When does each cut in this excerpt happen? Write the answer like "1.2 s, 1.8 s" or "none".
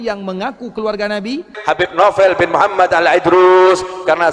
1.5 s